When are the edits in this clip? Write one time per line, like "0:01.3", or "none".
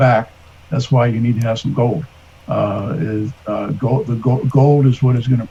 none